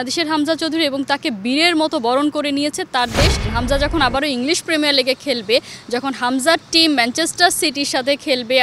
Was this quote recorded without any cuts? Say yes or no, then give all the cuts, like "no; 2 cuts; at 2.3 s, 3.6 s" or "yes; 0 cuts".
no; 1 cut; at 3.5 s